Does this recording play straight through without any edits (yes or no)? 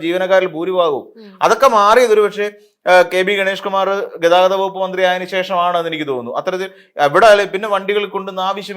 yes